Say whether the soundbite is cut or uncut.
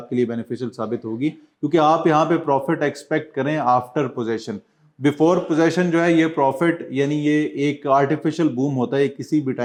uncut